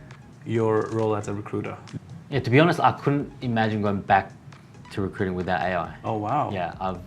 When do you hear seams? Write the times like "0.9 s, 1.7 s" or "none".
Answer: 1.8 s